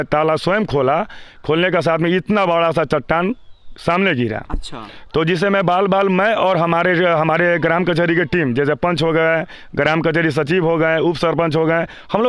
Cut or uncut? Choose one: uncut